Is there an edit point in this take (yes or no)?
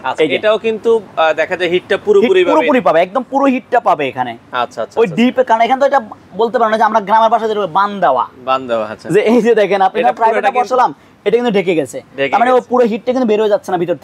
no